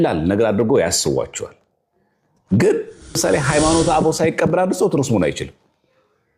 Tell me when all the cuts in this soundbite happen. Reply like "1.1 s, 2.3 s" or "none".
3.2 s

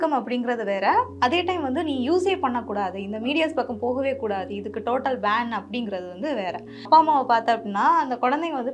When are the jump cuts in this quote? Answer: 6.9 s

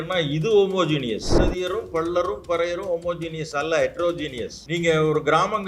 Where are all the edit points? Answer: 1.4 s, 4.5 s

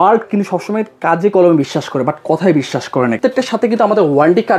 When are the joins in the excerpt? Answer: 3.2 s

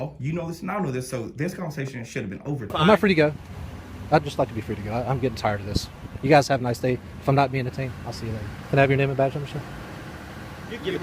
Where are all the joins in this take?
2.7 s, 8.5 s

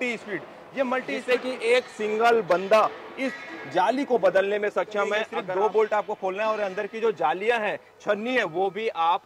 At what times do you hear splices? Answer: 1.1 s, 5.4 s

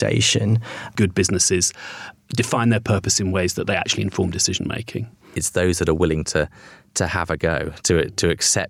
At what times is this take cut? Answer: 0.9 s, 5.3 s

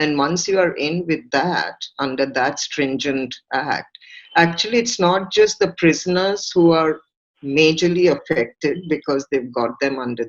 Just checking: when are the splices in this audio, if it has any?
none

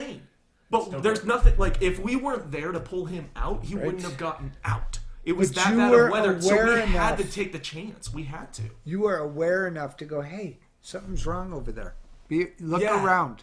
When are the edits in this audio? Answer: none

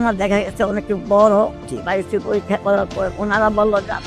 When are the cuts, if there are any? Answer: 1.6 s, 3.1 s

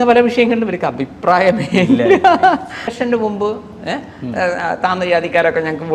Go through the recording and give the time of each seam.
2.9 s

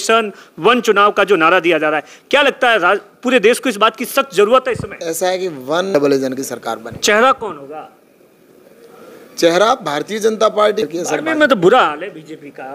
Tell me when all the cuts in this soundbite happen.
5.9 s, 10.9 s

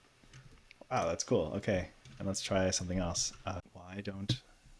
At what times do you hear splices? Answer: 3.6 s

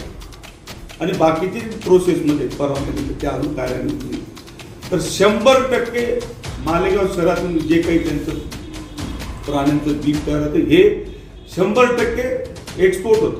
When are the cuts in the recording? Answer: none

